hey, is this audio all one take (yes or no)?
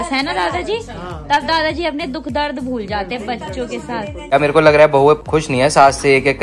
no